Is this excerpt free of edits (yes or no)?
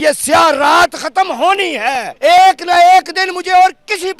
no